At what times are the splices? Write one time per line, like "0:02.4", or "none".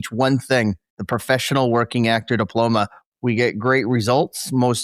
0:03.0